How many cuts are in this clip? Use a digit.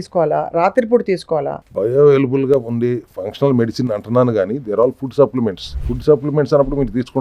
0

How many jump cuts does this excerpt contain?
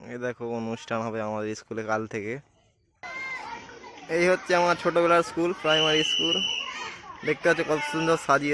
1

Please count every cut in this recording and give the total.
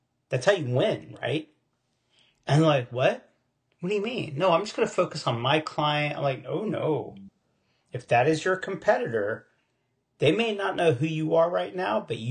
0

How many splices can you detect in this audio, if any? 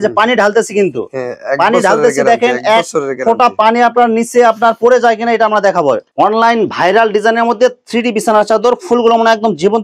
1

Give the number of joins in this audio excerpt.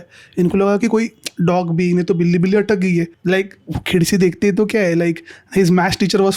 1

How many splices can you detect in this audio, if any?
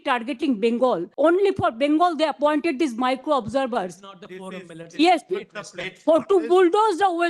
1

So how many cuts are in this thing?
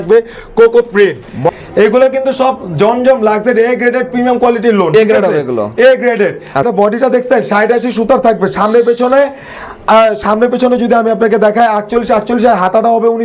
2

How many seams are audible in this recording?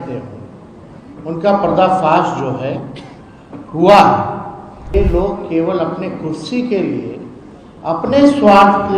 1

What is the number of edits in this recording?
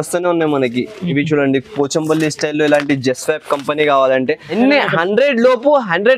1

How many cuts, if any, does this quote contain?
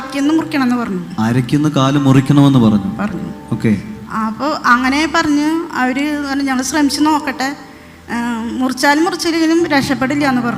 0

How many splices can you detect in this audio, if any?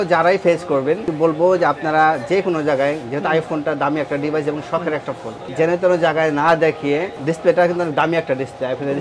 3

